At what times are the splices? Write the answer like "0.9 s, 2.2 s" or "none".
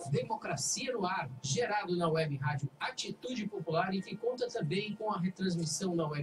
4.1 s

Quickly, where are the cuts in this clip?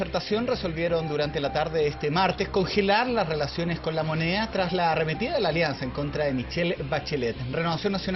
none

